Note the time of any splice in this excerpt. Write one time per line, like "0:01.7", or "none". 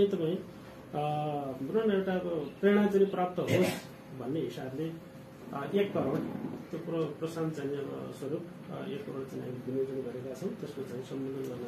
none